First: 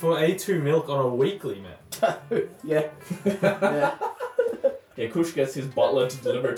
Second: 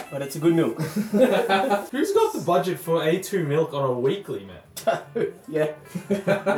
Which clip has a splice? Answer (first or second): second